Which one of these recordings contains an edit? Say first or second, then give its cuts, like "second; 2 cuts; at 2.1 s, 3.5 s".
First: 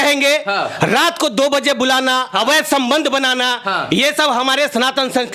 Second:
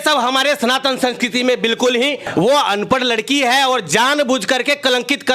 second; 1 cut; at 2.3 s